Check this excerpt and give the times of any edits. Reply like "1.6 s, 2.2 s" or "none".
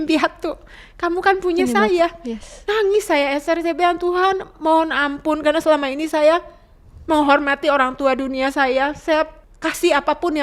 9.4 s

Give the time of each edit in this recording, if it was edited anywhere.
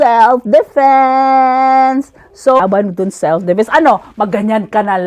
2.6 s

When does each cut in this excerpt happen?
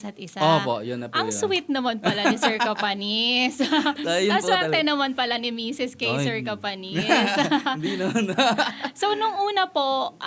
none

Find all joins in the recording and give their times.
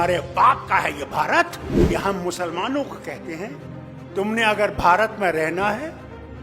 1.7 s

